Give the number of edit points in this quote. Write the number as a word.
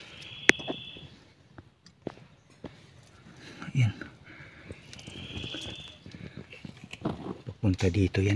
zero